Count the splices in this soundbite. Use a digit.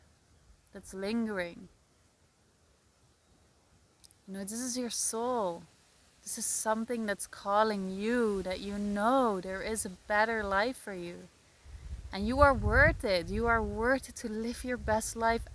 0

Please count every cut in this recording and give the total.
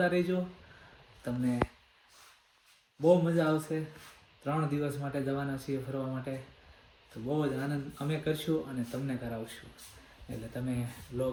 0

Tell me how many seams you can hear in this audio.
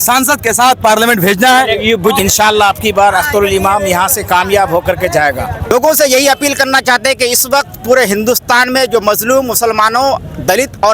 1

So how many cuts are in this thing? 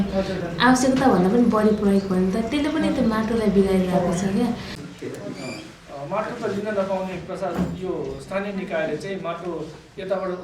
1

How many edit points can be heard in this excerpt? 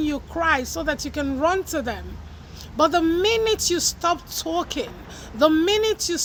0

